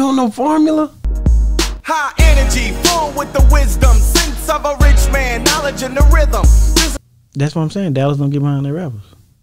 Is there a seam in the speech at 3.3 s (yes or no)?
no